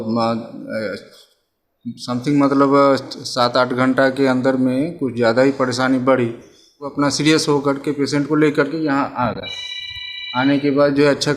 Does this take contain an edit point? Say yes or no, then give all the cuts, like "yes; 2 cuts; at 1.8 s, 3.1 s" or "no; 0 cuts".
yes; 1 cut; at 6.9 s